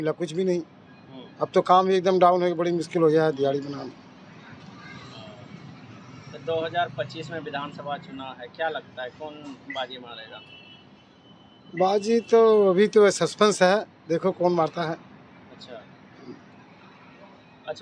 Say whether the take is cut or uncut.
uncut